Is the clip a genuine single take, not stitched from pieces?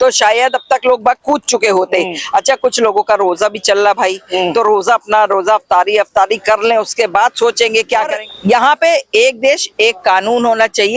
no; 1 cut; at 8.1 s

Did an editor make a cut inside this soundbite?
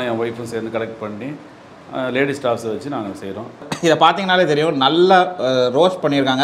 yes; 1 cut; at 3.7 s

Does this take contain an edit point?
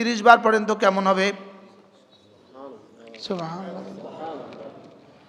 no; 0 cuts

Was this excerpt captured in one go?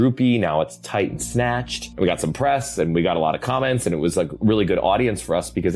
no; 1 cut; at 1.8 s

